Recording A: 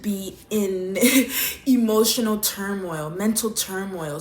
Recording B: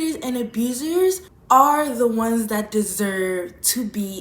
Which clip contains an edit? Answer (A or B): B